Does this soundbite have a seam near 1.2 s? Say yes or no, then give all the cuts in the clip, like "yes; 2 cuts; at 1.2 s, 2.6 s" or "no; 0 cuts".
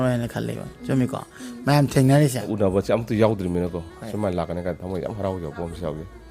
no; 1 cut; at 2.5 s